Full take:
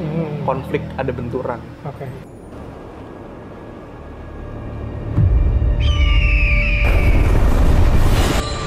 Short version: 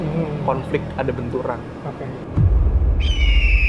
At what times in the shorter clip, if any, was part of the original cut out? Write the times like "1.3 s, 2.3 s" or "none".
2.1 s